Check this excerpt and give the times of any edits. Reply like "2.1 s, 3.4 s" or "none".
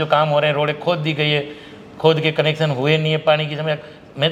none